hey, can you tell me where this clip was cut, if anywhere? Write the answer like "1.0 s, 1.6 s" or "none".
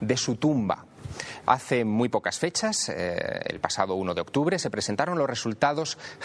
3.9 s